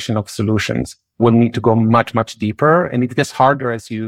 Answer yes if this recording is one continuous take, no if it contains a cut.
no